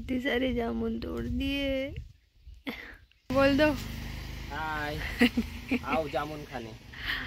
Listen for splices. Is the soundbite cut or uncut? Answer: cut